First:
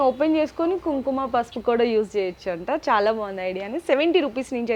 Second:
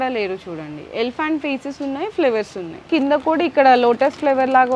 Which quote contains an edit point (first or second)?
second